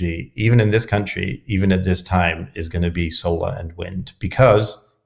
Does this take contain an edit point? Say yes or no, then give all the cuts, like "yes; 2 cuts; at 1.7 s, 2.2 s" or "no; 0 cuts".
no; 0 cuts